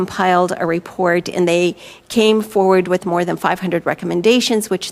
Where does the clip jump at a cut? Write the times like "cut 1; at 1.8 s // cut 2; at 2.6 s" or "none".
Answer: none